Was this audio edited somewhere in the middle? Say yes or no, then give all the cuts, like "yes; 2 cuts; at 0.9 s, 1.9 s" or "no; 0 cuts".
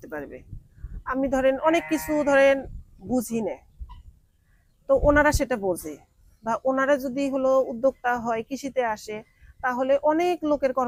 no; 0 cuts